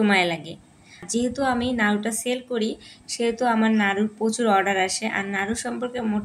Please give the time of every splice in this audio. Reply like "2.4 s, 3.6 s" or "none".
1.0 s